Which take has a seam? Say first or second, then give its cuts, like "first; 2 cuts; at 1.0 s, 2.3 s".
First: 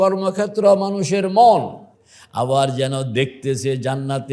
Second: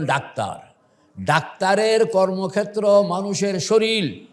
first; 1 cut; at 1.8 s